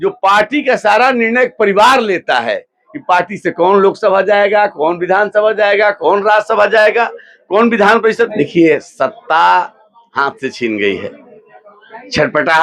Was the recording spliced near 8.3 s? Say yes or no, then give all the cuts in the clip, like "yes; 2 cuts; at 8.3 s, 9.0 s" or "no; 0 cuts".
yes; 1 cut; at 8.3 s